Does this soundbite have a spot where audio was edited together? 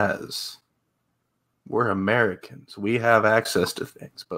no; 0 cuts

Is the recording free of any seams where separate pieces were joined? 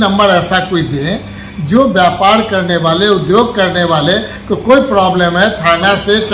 yes; 0 cuts

